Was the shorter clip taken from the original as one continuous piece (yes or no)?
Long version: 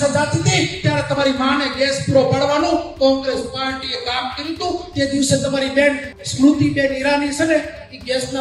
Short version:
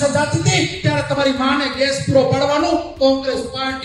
yes